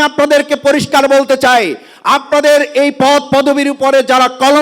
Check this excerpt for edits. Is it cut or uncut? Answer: uncut